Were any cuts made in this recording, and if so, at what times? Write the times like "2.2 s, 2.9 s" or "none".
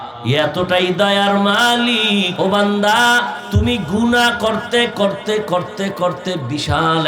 2.3 s, 3.4 s